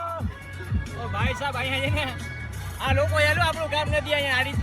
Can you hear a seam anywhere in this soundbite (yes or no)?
no